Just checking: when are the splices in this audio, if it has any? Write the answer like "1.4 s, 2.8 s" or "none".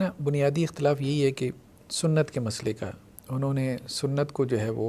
3.1 s

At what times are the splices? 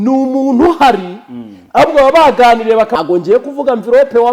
3.0 s

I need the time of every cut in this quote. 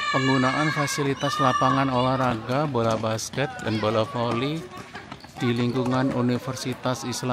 none

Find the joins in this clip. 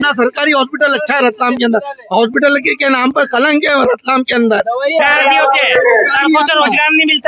5.0 s

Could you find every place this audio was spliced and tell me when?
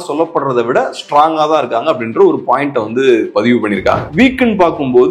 4.1 s

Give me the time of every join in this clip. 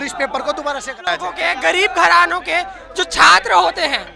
1.3 s

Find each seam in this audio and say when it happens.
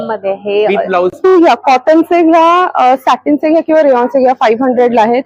1.3 s

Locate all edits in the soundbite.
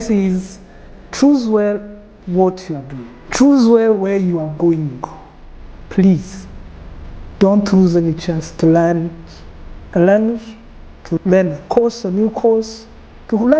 5.8 s, 8.5 s, 11.2 s

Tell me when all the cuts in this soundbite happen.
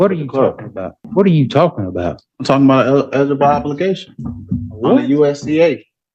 1.0 s

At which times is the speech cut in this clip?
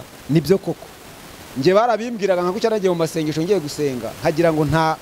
none

